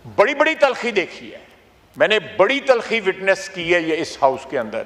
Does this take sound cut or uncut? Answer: uncut